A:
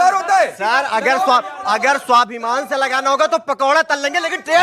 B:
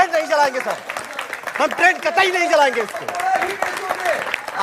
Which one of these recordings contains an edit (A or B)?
B